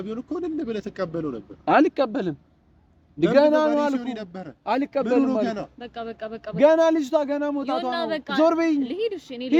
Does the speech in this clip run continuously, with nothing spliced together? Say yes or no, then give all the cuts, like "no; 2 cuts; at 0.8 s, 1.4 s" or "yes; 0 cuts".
yes; 0 cuts